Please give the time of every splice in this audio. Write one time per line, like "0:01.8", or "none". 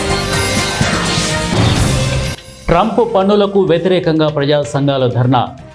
0:01.1